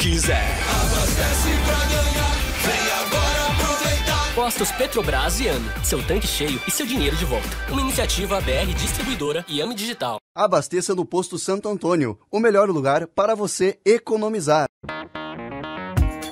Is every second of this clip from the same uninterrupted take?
no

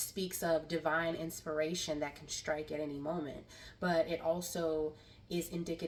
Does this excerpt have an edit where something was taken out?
no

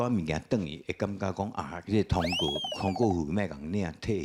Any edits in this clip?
no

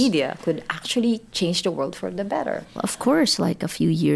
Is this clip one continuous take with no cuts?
no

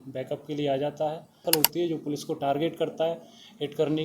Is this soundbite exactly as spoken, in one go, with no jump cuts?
no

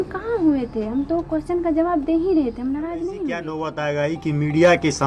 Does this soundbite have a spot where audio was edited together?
yes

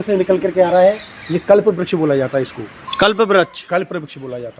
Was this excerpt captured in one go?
yes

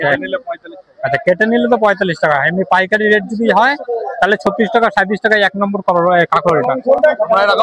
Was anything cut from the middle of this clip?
no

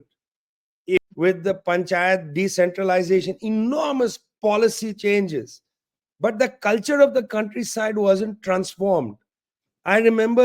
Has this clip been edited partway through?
yes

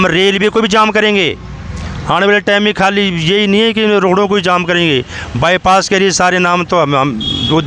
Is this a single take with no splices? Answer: yes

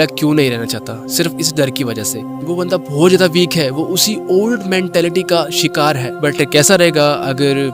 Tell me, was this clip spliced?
yes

